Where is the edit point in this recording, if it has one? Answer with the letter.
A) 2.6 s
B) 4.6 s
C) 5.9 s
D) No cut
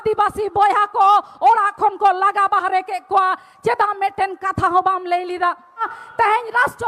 C